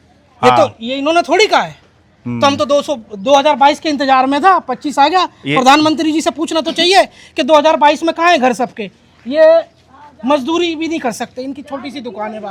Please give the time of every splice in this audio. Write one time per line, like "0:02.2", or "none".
none